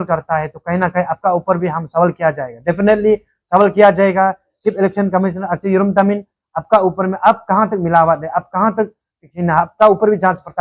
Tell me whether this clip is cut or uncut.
uncut